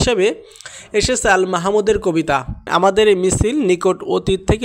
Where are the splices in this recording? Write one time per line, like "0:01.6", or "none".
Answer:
0:02.6